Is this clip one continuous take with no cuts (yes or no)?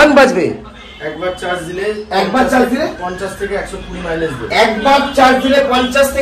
yes